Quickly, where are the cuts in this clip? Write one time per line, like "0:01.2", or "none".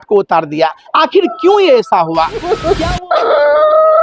0:02.6